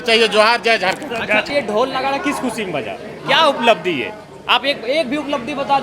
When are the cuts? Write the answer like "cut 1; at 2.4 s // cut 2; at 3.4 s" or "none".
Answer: cut 1; at 1.5 s